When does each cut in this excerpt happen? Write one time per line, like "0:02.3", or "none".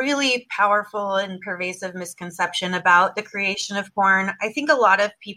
none